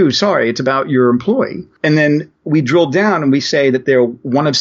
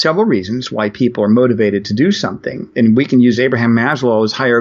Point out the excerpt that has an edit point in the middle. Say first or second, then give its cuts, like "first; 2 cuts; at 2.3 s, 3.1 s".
first; 1 cut; at 1.6 s